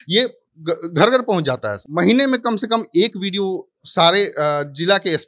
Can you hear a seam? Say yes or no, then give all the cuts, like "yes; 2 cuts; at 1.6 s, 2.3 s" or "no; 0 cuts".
yes; 1 cut; at 1.8 s